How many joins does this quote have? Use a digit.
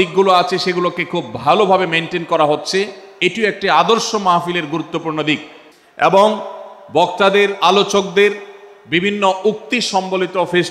1